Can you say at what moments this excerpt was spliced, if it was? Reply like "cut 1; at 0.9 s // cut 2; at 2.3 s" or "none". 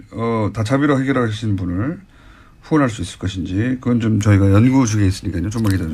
cut 1; at 1.0 s